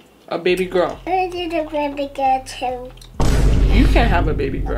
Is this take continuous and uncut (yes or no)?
no